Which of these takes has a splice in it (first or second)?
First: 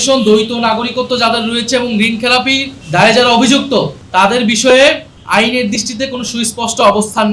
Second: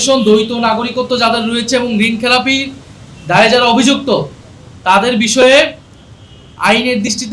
first